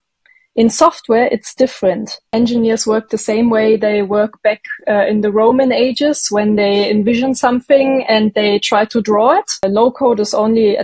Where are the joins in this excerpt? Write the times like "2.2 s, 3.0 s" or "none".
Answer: 2.3 s, 9.6 s